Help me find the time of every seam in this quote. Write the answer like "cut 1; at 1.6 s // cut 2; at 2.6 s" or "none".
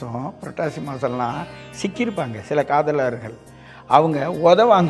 none